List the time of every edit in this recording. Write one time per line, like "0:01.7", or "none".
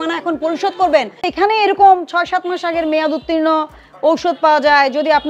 0:01.3